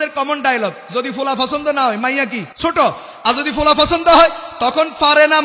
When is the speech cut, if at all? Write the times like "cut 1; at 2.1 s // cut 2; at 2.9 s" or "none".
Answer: cut 1; at 2.5 s